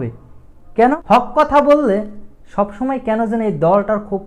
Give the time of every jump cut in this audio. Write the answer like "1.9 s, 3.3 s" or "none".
1.0 s